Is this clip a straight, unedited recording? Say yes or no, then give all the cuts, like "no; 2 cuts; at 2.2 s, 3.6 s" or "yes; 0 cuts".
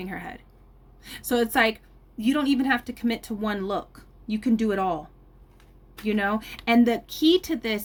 yes; 0 cuts